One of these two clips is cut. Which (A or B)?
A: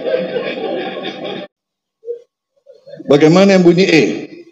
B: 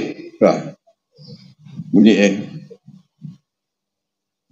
A